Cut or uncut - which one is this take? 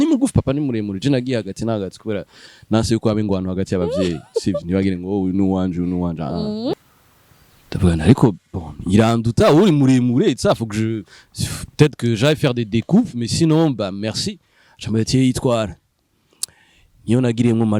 cut